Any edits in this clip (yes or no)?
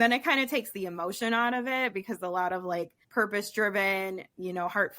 yes